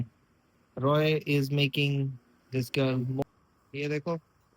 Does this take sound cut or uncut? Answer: cut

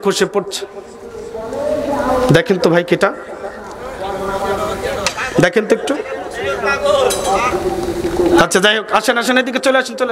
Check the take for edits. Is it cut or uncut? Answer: uncut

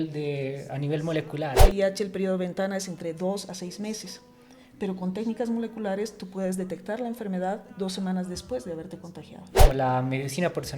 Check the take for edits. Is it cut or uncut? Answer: cut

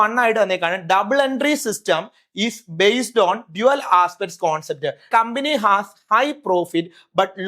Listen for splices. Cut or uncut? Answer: cut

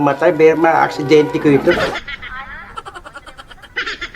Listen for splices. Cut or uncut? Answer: cut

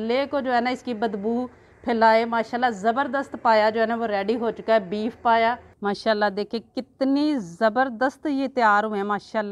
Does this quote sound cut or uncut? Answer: cut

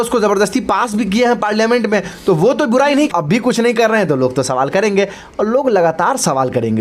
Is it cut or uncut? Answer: cut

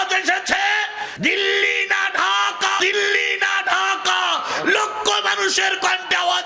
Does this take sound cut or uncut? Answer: uncut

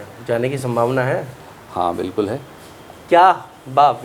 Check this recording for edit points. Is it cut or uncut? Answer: uncut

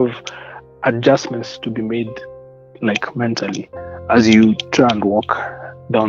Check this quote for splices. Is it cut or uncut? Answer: uncut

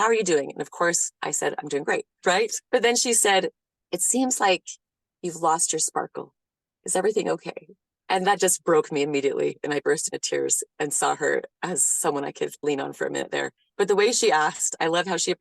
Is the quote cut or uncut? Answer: cut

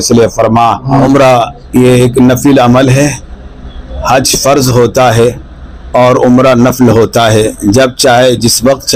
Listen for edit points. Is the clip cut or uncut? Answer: cut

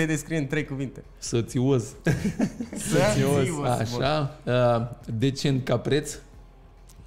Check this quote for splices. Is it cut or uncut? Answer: uncut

